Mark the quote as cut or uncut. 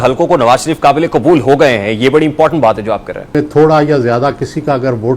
cut